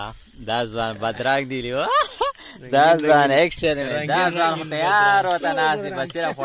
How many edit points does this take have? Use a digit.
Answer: 0